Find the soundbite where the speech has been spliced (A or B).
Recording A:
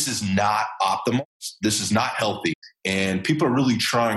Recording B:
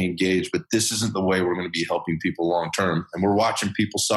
A